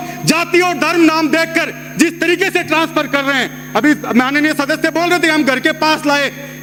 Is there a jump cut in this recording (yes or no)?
no